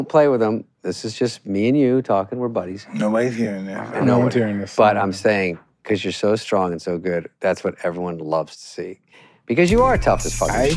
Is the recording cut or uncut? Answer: uncut